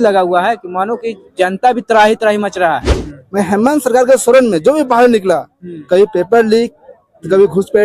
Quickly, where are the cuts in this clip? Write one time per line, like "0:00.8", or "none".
0:02.9